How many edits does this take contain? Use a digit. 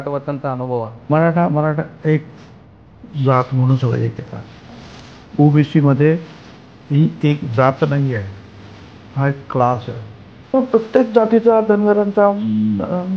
2